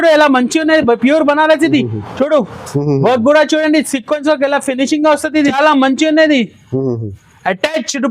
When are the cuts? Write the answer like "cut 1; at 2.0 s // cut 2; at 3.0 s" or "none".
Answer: cut 1; at 5.5 s